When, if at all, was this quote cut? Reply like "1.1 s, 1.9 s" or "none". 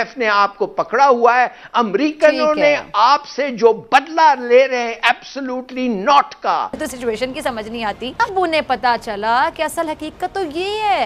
6.9 s, 8.2 s